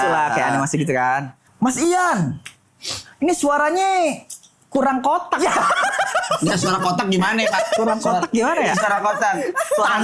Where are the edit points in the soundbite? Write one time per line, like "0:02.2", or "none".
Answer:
0:01.4